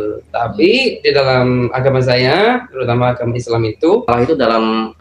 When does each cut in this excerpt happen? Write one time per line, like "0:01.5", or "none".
0:04.1